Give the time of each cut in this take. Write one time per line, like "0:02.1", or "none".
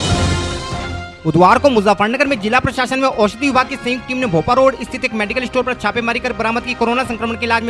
0:01.0